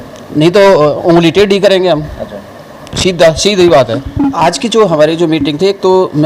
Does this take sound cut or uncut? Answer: uncut